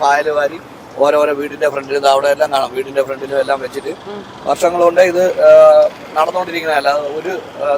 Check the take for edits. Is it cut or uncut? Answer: uncut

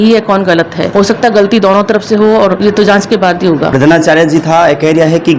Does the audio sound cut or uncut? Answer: uncut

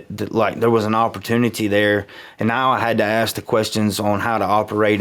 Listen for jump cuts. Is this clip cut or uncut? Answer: uncut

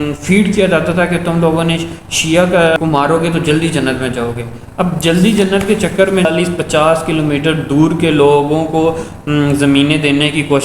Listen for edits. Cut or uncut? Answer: cut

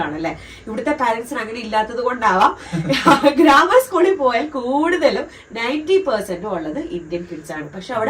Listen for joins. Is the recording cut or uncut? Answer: uncut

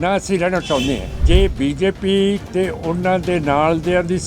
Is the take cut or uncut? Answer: cut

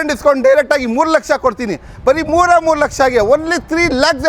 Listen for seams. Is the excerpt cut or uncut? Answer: uncut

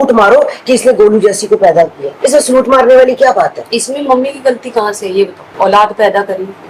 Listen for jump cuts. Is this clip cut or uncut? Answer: uncut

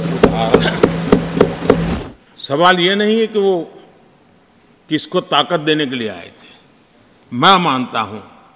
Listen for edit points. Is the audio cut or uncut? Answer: cut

